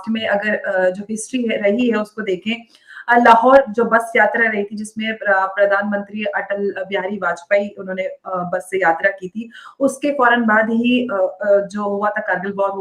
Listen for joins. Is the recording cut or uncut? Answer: uncut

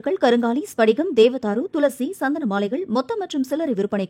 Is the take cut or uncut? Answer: uncut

